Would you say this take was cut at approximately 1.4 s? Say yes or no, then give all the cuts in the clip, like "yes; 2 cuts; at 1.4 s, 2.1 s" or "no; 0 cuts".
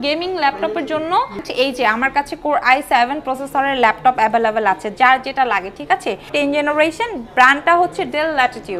yes; 2 cuts; at 1.4 s, 6.3 s